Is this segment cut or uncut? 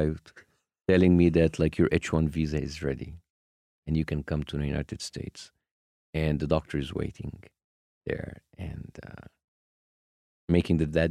uncut